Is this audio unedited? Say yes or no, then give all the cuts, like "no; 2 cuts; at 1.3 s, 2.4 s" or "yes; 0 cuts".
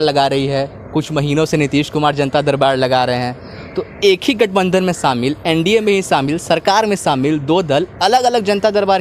yes; 0 cuts